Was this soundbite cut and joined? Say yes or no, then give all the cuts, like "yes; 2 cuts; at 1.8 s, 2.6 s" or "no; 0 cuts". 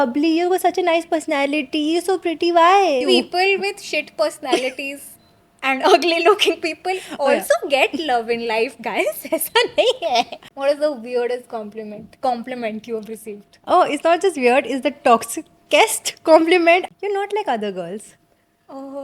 yes; 3 cuts; at 3.0 s, 10.4 s, 16.9 s